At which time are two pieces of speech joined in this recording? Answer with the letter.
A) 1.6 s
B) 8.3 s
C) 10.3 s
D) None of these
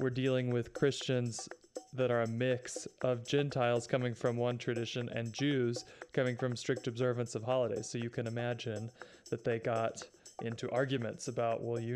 D